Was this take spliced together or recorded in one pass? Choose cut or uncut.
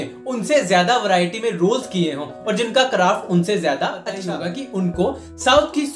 cut